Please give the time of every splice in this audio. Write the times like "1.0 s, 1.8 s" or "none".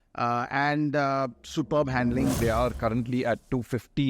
2.4 s